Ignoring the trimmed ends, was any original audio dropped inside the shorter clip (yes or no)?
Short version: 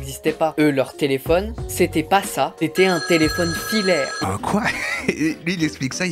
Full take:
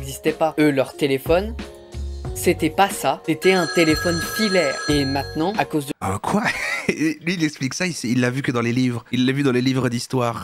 yes